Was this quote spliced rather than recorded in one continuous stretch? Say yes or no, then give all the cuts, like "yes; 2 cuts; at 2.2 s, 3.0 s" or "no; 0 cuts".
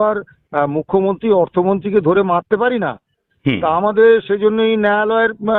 no; 0 cuts